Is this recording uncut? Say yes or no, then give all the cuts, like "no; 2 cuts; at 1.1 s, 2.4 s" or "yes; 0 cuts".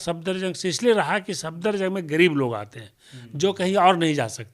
yes; 0 cuts